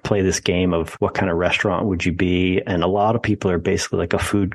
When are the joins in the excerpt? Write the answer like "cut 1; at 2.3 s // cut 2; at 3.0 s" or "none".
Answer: cut 1; at 0.9 s